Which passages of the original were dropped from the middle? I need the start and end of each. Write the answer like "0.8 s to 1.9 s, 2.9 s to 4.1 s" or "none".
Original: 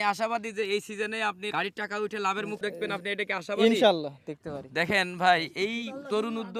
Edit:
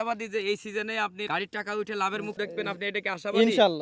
none